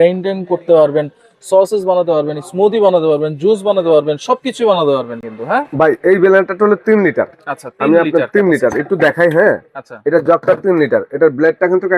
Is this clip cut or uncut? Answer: uncut